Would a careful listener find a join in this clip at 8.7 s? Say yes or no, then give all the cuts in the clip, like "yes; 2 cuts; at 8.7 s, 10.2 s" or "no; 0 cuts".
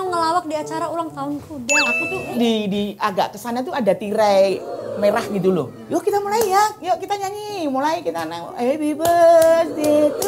no; 2 cuts; at 2.0 s, 5.8 s